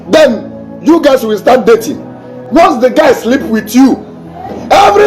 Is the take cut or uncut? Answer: cut